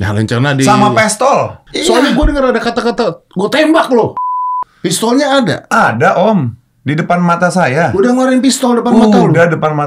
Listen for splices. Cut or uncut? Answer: cut